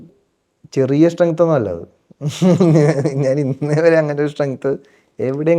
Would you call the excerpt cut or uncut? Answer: uncut